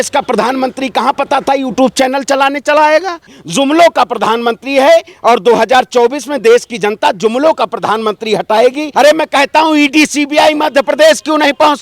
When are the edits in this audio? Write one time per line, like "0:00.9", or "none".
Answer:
0:03.4
0:08.8